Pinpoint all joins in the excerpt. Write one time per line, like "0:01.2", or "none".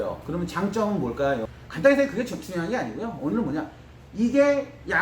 0:01.6